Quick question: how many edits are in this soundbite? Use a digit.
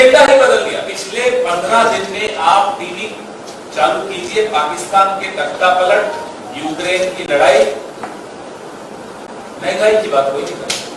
0